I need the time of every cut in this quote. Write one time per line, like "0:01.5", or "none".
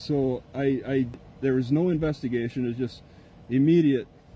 0:01.2